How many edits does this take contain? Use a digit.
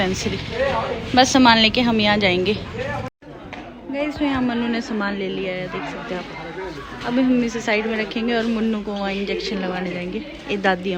0